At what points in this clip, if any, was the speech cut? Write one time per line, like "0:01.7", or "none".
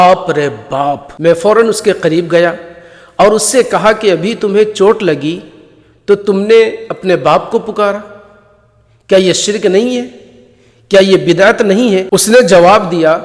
0:01.1